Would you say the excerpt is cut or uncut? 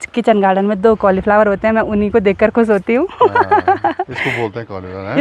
uncut